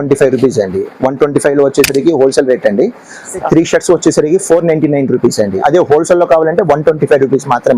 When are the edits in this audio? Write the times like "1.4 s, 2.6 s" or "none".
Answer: 3.4 s, 5.6 s